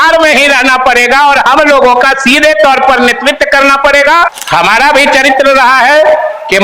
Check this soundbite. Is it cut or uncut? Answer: cut